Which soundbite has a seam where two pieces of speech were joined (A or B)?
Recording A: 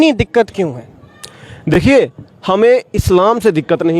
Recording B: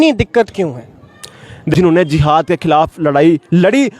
B